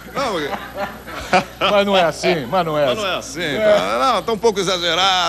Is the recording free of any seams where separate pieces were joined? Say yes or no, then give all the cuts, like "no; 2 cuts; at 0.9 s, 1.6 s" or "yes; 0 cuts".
yes; 0 cuts